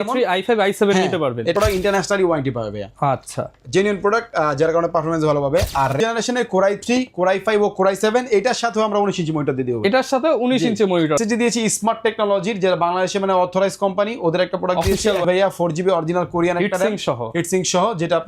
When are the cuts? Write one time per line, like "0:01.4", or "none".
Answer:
0:01.5
0:06.0
0:11.2
0:15.2